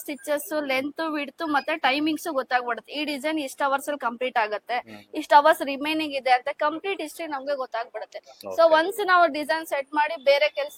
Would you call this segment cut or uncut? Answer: uncut